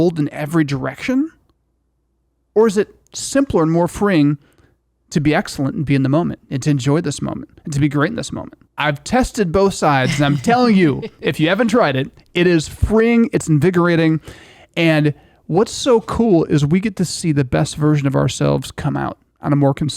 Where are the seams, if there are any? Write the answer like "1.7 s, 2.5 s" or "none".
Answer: 8.6 s